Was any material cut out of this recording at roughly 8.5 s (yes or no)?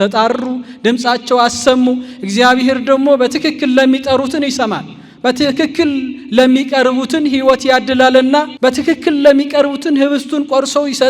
yes